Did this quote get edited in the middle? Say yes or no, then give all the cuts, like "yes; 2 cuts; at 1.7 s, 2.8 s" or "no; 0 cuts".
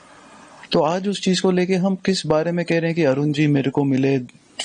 no; 0 cuts